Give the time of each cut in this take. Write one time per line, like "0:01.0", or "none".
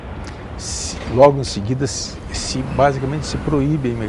none